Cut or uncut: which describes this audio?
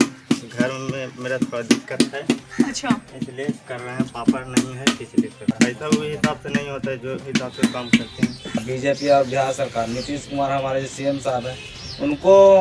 cut